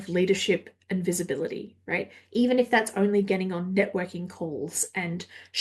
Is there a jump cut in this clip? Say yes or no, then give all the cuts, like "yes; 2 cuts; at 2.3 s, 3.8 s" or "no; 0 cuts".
no; 0 cuts